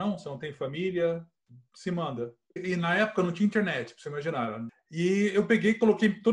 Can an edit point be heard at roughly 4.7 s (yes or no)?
yes